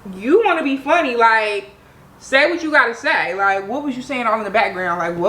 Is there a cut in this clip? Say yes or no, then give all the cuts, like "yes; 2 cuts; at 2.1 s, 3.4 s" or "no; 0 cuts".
no; 0 cuts